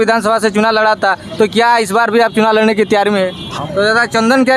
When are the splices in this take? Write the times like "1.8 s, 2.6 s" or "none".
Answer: 3.5 s